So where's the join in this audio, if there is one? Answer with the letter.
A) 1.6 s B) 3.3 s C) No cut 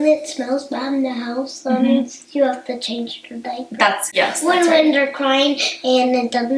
C